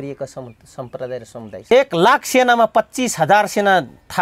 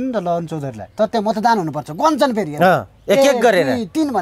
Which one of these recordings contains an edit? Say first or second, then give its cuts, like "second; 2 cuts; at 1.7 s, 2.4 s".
first; 1 cut; at 1.7 s